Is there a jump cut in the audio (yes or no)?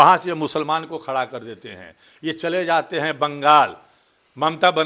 no